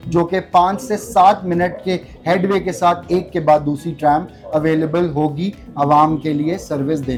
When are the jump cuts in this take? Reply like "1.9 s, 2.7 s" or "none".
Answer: none